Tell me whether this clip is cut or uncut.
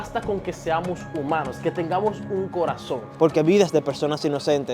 cut